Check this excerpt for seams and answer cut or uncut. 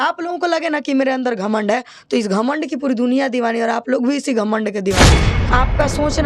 cut